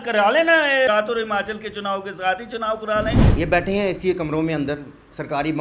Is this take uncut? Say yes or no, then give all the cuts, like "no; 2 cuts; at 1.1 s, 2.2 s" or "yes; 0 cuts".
no; 2 cuts; at 0.9 s, 3.2 s